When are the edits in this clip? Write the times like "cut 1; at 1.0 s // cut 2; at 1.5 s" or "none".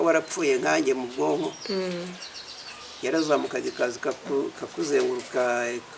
none